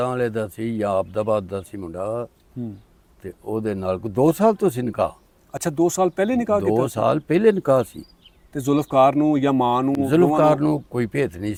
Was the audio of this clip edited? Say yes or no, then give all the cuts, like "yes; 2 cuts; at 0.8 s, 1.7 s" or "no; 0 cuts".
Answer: no; 0 cuts